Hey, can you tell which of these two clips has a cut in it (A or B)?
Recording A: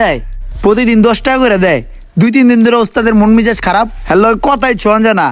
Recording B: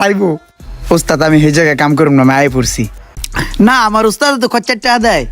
B